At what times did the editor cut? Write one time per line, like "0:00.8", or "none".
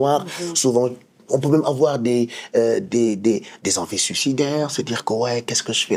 none